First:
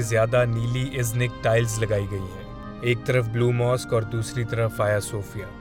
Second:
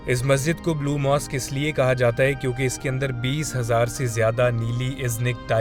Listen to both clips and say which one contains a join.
first; 1 cut; at 2.6 s

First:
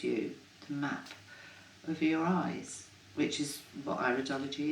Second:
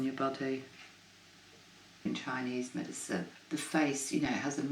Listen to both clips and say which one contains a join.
second; 2 cuts; at 2.0 s, 3.4 s

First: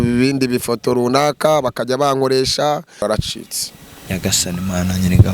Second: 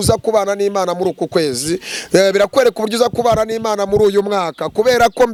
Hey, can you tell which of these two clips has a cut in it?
first; 1 cut; at 3.0 s

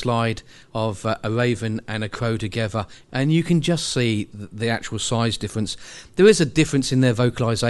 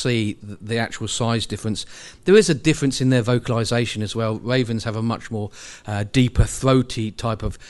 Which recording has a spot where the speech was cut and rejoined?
first; 1 cut; at 3.0 s

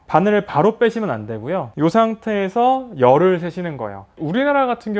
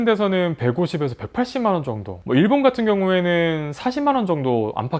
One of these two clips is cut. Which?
first; 1 cut; at 4.1 s

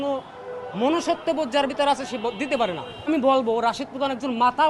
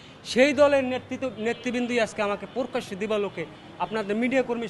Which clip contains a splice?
first; 1 cut; at 3.0 s

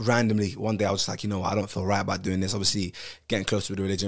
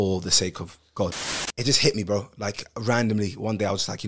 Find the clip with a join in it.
second; 1 cut; at 1.3 s

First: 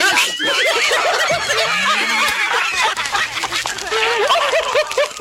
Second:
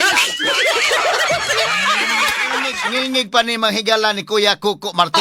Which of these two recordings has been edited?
second; 1 cut; at 2.8 s

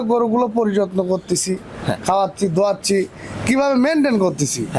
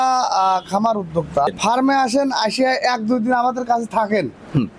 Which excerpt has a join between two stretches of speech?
second; 1 cut; at 1.5 s

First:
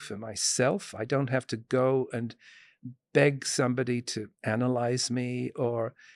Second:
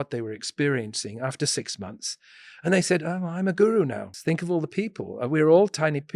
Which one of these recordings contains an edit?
second; 1 cut; at 4.1 s

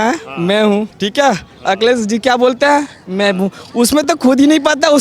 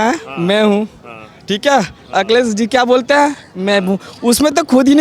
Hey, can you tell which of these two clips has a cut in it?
first; 1 cut; at 1.0 s

